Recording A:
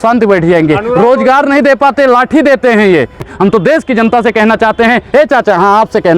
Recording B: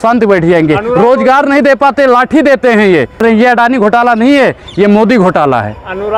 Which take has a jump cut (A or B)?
A